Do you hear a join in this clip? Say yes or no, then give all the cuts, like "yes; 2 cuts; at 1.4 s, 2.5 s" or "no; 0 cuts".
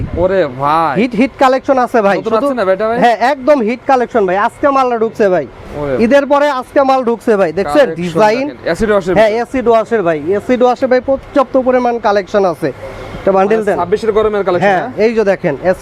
no; 0 cuts